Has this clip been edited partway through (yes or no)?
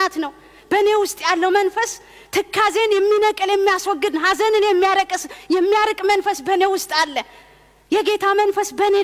no